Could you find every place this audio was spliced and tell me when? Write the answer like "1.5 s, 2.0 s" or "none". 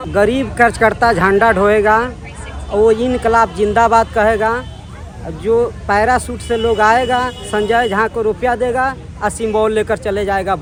none